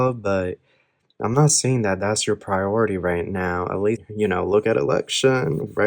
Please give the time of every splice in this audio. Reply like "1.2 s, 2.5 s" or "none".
4.1 s